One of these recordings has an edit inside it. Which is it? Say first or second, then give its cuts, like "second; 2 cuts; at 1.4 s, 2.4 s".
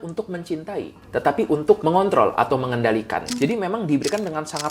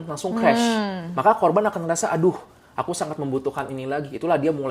first; 2 cuts; at 1.8 s, 3.3 s